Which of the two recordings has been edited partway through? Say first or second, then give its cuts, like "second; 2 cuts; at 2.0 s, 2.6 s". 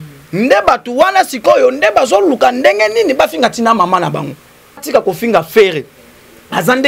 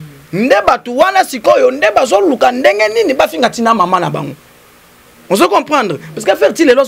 first; 1 cut; at 4.8 s